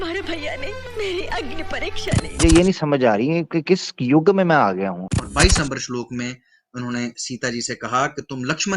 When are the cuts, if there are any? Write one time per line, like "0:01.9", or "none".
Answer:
0:02.4
0:05.1